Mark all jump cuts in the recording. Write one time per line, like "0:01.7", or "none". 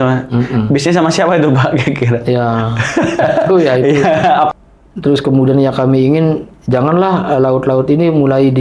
0:04.5